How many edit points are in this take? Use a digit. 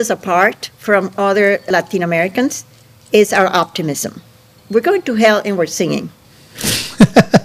2